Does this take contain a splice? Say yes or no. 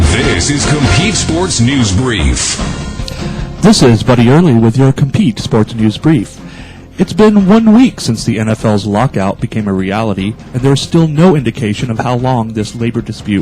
yes